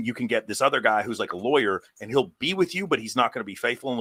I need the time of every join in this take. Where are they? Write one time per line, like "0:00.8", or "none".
none